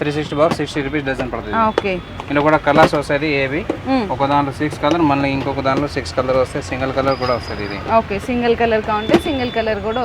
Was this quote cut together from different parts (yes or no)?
no